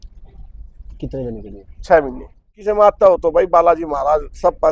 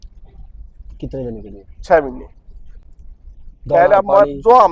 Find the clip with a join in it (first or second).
first